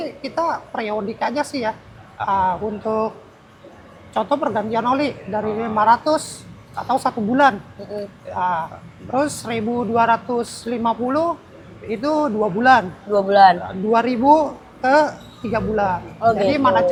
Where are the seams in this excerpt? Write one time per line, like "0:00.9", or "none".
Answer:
none